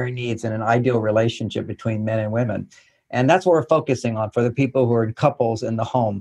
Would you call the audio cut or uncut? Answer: uncut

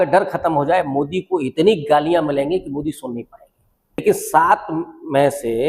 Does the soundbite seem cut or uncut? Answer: cut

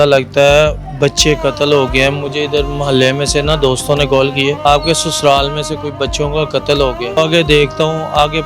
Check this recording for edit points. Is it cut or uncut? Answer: cut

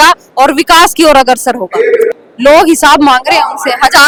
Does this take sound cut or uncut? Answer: uncut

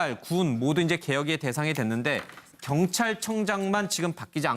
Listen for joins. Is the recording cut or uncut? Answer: cut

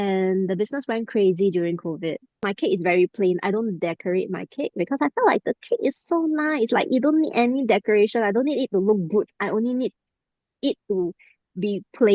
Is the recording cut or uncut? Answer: cut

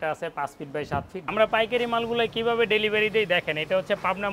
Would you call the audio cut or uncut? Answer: cut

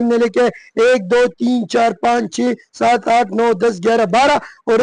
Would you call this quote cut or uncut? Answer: uncut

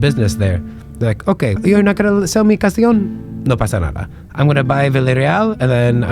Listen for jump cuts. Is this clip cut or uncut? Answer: cut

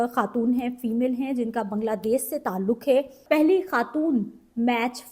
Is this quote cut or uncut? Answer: cut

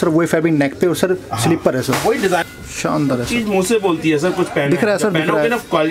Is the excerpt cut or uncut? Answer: cut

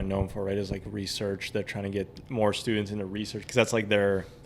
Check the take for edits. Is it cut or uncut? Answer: cut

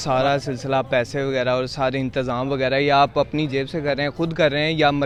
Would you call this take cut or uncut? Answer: uncut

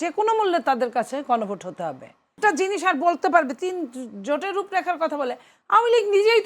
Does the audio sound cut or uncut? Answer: cut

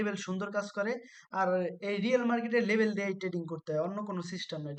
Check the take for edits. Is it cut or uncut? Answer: uncut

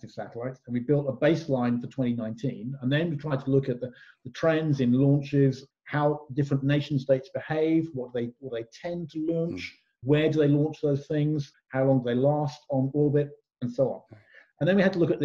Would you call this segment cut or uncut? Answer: cut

